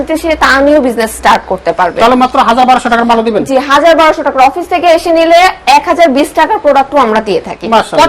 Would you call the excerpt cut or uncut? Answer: uncut